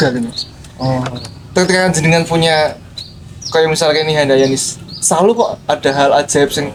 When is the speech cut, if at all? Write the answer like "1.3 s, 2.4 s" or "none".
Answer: none